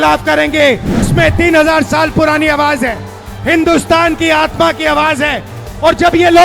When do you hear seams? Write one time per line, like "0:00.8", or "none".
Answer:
0:01.1